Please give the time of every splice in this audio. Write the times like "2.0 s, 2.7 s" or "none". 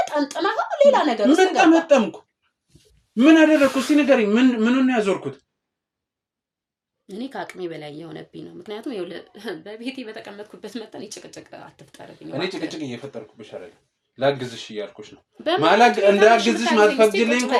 none